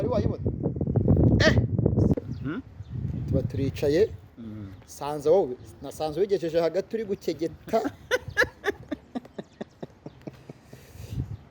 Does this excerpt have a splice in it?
yes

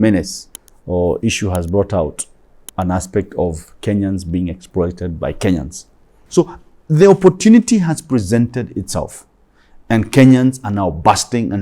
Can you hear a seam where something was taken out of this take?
yes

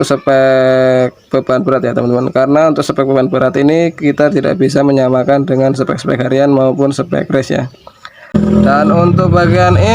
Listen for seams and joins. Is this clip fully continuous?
no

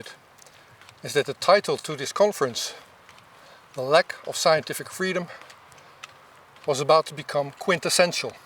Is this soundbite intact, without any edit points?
yes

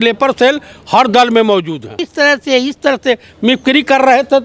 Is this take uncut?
no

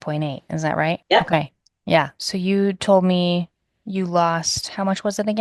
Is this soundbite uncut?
no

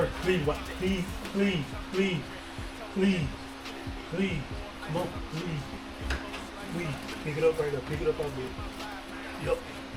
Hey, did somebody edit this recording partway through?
no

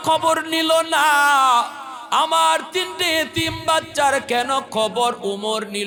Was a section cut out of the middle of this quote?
no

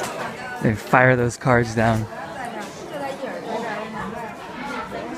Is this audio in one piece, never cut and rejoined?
yes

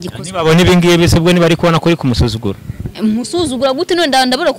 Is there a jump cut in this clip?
no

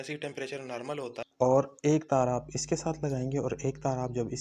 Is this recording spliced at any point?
yes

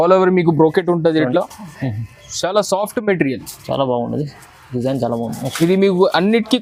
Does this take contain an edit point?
no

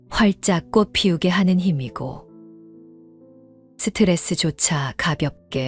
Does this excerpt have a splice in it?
yes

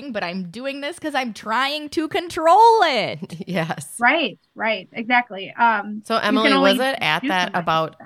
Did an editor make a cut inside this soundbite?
no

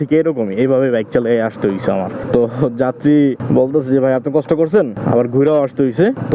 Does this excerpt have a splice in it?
no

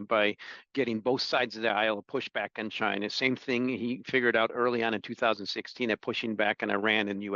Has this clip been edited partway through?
no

